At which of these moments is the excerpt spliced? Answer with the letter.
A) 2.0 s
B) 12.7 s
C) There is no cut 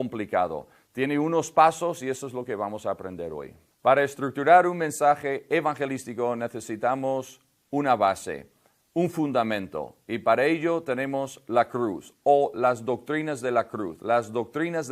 A